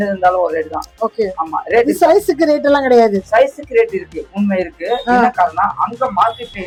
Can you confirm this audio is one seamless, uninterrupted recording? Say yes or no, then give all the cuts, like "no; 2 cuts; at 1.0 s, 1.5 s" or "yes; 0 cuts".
yes; 0 cuts